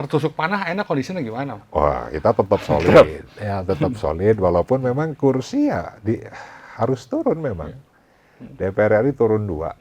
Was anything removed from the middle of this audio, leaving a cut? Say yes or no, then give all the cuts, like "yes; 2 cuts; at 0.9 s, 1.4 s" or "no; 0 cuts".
no; 0 cuts